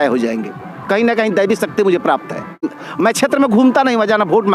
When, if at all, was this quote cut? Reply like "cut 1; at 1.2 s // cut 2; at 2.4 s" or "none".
cut 1; at 2.7 s

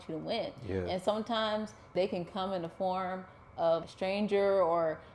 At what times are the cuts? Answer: cut 1; at 1.9 s // cut 2; at 3.8 s

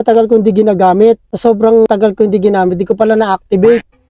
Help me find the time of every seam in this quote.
cut 1; at 1.3 s

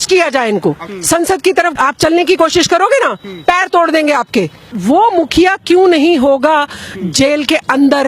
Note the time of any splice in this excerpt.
cut 1; at 0.9 s // cut 2; at 4.6 s

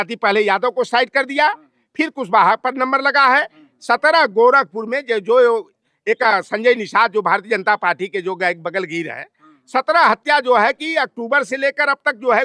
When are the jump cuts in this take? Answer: none

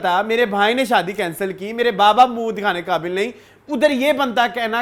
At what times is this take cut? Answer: none

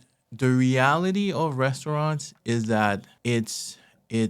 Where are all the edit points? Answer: cut 1; at 3.1 s

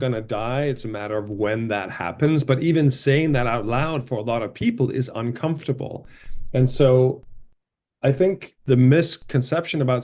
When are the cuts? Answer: none

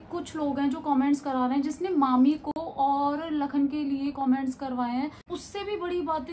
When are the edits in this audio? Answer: cut 1; at 5.2 s

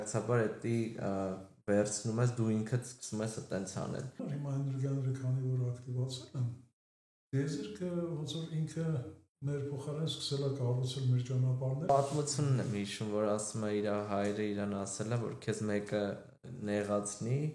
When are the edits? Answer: cut 1; at 4.2 s // cut 2; at 11.9 s

